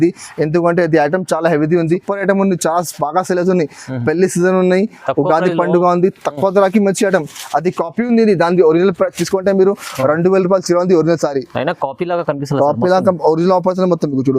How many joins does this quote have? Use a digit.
1